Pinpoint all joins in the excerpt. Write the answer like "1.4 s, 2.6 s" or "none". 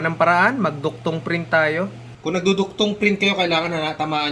2.1 s